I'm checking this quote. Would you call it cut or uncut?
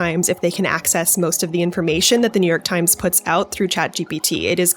uncut